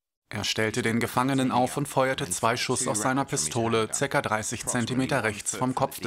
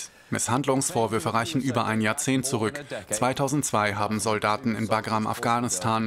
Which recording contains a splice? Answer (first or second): first